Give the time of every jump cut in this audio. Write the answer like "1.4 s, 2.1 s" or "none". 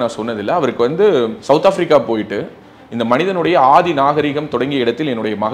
1.4 s